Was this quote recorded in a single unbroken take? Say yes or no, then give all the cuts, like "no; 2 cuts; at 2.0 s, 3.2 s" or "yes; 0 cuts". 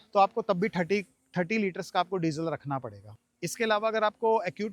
yes; 0 cuts